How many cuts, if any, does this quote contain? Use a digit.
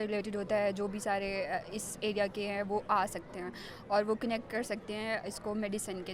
0